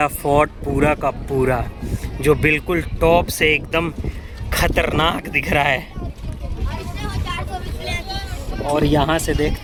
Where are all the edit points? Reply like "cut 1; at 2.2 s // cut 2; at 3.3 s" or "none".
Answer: none